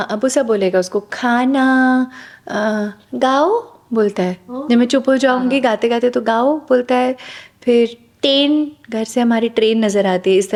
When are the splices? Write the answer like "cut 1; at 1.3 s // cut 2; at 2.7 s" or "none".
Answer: none